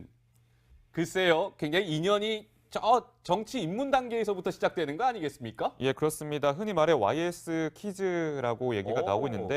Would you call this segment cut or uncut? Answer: uncut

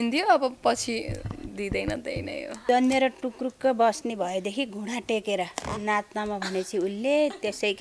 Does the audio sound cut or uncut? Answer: cut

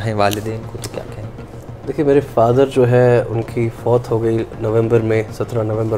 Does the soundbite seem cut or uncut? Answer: uncut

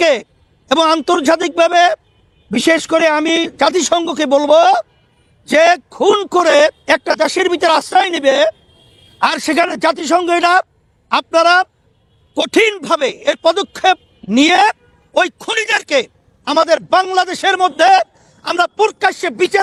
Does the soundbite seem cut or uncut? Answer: uncut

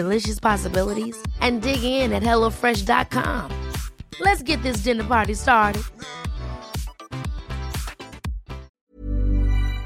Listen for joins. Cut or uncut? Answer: cut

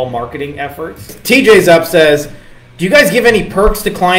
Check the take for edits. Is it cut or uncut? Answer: cut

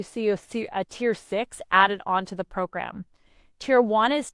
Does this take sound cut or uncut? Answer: uncut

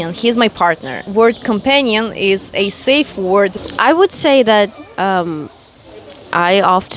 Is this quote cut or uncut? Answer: uncut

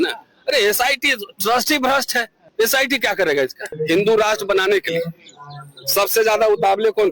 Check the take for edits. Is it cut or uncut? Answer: cut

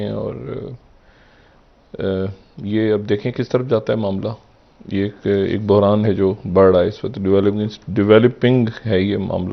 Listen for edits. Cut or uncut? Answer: uncut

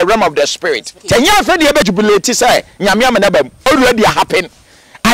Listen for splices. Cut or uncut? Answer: cut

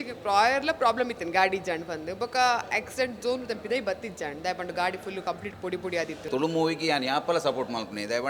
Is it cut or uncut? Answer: cut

